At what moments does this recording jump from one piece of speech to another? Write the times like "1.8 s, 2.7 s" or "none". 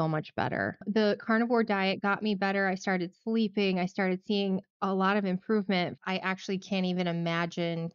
0.8 s, 6.0 s